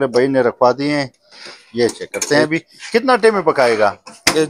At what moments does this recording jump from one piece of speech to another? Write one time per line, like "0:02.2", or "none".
none